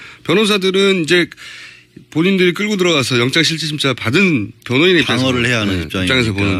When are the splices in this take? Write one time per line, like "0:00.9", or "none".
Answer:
none